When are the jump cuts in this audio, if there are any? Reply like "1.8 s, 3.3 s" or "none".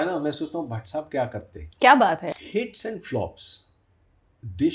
2.3 s